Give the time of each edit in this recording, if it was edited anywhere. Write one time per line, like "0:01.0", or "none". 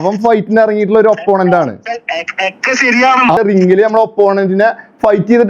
0:03.4